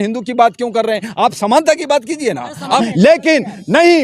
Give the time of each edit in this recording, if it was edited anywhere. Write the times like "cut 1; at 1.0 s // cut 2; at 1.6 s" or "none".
cut 1; at 2.9 s